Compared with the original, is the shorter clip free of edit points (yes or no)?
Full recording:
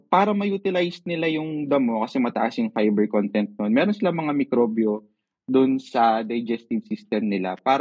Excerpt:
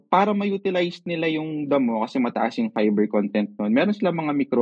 yes